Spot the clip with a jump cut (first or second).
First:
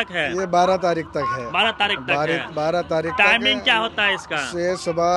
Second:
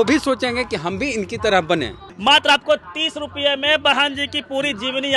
second